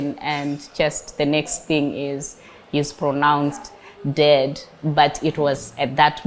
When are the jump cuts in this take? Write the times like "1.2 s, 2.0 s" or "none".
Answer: none